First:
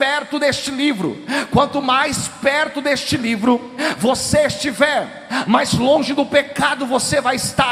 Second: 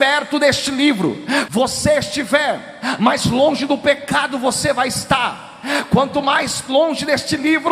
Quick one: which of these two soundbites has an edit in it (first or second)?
second